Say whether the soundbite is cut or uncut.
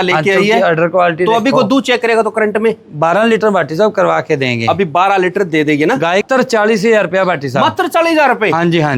cut